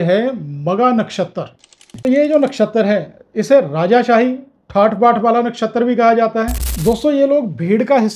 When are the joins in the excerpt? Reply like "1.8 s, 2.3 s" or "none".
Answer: 1.9 s, 6.6 s